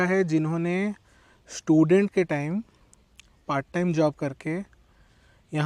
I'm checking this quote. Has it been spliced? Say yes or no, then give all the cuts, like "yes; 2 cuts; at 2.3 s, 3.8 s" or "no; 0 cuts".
no; 0 cuts